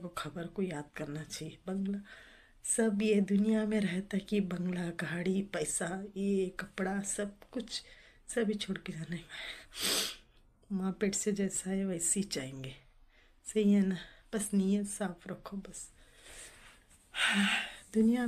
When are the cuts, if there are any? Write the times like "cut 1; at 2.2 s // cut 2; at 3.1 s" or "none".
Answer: none